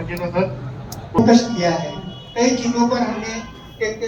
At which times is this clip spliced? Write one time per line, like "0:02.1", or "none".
0:01.2